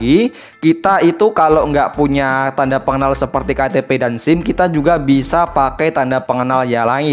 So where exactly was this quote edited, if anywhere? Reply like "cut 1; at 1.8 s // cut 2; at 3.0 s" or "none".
none